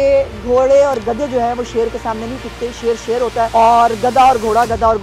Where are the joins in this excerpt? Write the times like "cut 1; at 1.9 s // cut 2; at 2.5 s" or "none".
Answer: cut 1; at 3.5 s